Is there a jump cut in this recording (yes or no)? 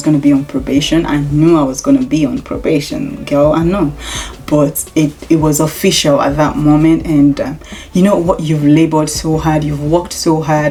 no